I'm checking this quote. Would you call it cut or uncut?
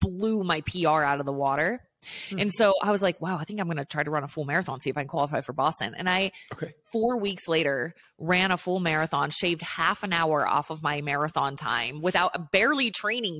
uncut